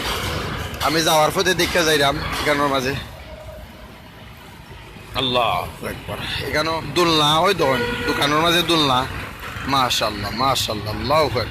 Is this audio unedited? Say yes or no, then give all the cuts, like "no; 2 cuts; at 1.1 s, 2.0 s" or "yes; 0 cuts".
no; 1 cut; at 6.8 s